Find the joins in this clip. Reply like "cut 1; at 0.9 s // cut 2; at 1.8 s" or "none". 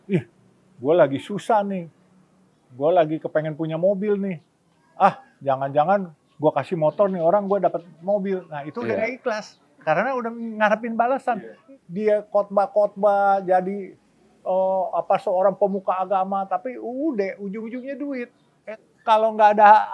cut 1; at 11.6 s // cut 2; at 18.5 s